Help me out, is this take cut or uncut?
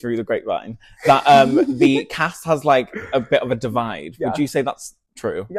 uncut